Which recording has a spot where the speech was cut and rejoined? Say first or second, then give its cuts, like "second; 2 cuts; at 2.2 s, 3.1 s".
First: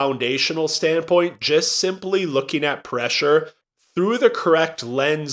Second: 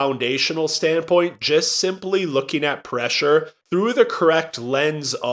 second; 1 cut; at 3.6 s